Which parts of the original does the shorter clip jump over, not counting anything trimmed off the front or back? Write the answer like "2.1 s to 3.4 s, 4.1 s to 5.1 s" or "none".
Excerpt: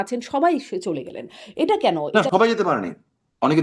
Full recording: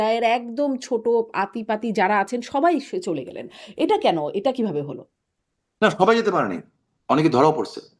4.3 s to 5.8 s